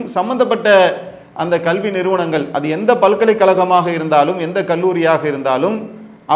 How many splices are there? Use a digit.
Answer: 0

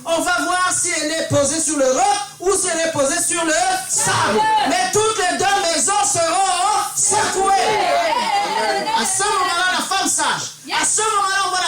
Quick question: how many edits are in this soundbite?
0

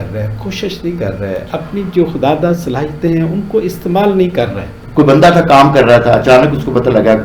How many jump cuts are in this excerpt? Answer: 1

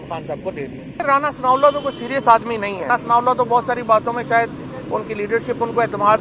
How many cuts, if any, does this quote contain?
2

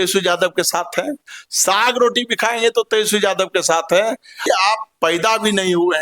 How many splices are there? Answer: 1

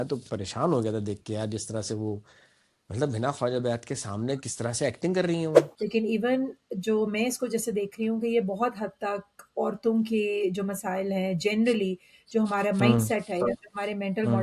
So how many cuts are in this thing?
1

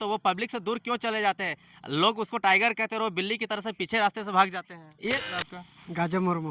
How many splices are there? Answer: 1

